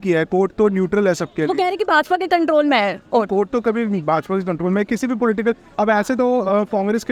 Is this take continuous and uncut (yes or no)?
yes